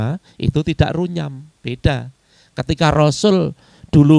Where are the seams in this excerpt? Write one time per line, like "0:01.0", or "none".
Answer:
0:01.5